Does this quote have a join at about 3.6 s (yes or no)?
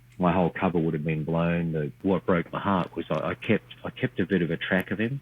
no